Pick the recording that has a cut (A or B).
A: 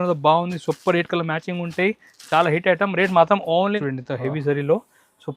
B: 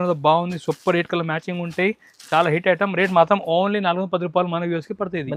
A